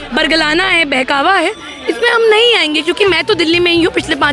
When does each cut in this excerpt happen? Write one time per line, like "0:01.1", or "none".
0:03.0

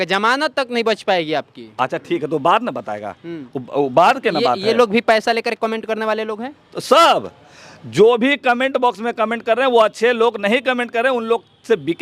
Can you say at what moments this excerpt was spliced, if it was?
none

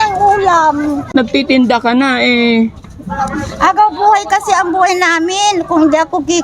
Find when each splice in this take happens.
0:01.1

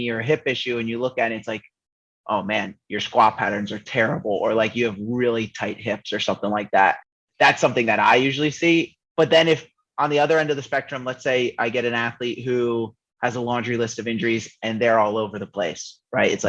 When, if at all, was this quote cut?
none

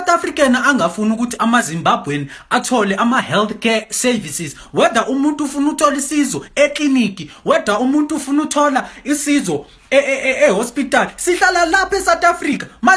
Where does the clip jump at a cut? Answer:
none

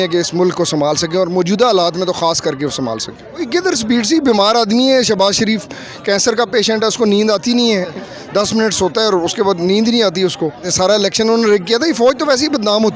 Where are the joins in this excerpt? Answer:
0:03.5
0:08.0
0:10.6

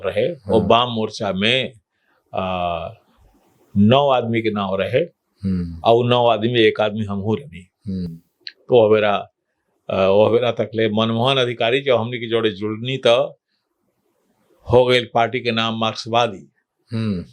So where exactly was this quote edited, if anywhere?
none

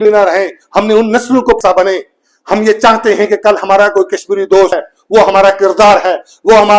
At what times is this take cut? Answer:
0:01.6
0:04.9

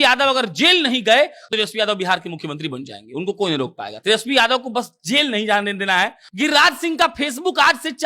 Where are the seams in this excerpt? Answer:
0:01.4
0:06.2

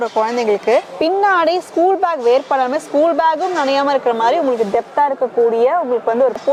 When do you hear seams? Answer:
none

